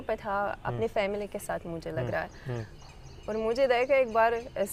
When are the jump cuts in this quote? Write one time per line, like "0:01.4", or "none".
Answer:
none

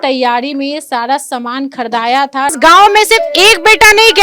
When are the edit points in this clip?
0:02.6

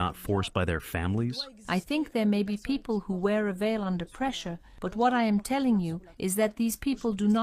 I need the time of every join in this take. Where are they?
0:01.5

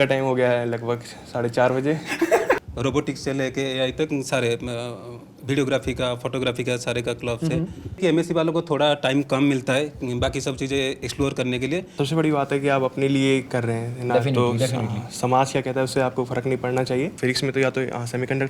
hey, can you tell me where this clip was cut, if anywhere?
0:02.6
0:08.0
0:11.9
0:17.1

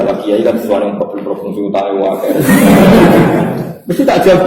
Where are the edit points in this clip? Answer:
none

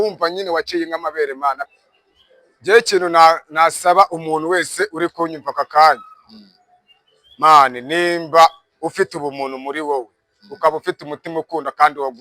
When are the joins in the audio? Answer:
0:01.7

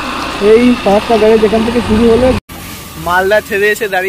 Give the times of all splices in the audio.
0:02.4

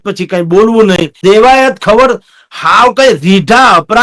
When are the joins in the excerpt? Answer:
0:01.1

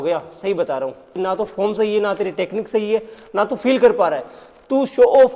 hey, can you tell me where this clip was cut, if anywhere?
0:01.1

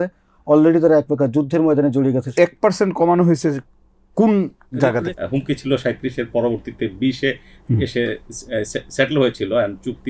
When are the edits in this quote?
0:02.3
0:04.9

